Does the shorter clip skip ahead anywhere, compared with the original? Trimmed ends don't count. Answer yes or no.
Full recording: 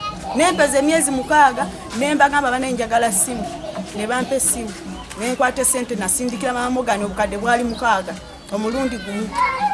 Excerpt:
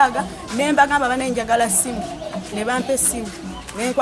no